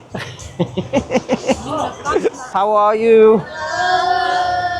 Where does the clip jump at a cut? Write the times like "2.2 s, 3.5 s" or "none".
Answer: 2.4 s